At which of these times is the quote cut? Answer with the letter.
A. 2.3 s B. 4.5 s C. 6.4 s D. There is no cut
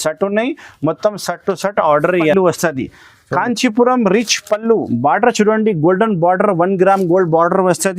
A